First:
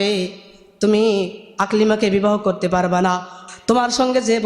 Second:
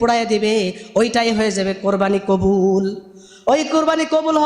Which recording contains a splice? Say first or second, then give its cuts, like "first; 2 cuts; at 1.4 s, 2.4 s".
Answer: first; 1 cut; at 3.5 s